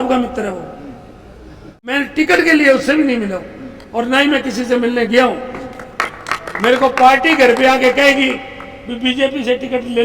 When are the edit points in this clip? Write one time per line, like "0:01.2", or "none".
0:01.8